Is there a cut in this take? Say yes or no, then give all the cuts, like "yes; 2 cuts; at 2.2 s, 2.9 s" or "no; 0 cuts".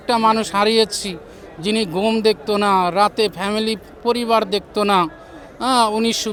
no; 0 cuts